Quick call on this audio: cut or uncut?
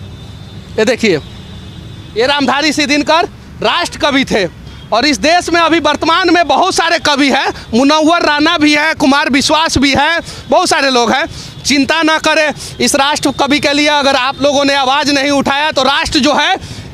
uncut